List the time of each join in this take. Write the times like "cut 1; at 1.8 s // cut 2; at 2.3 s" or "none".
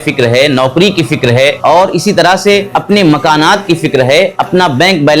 cut 1; at 1.6 s // cut 2; at 2.7 s // cut 3; at 4.4 s